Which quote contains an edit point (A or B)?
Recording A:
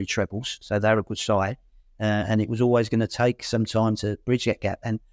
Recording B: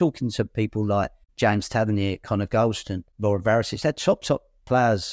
B